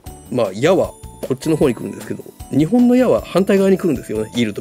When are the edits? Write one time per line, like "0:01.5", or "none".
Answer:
0:01.0
0:02.4

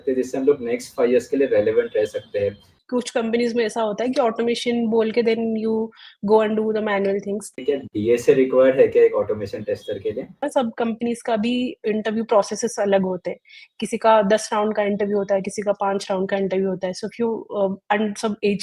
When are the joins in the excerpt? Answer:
0:02.8
0:07.6
0:10.4

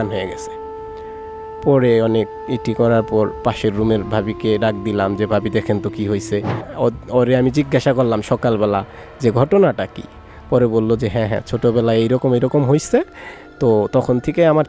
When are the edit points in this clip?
0:06.6

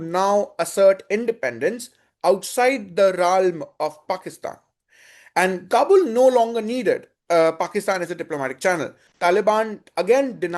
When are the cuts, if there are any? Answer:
0:09.0

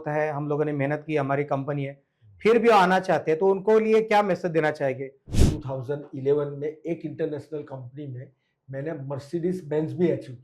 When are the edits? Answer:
0:05.3

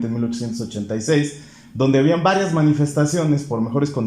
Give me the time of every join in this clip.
none

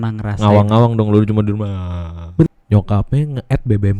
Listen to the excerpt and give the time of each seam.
0:02.5

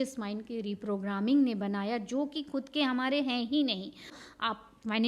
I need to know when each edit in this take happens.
0:04.2

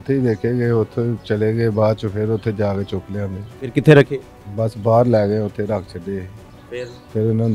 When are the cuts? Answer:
none

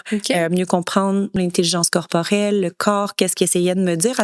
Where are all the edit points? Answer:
0:01.4

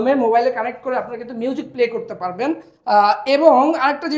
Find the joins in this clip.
none

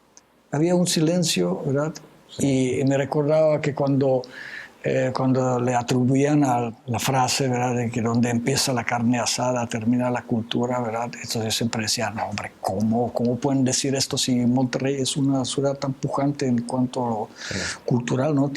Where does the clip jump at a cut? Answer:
0:06.8

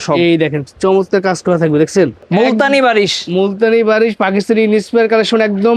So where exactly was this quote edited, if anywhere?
0:02.2

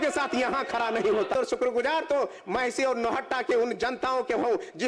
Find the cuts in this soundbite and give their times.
0:01.4

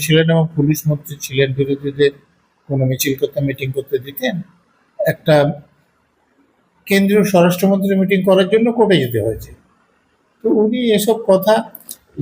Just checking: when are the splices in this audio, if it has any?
none

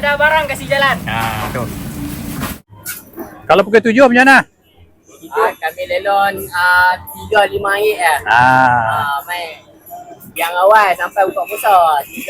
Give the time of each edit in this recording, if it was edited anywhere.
0:02.6

